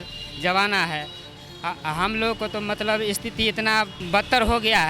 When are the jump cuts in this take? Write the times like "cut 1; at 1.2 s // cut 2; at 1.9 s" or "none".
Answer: cut 1; at 1.3 s // cut 2; at 4.0 s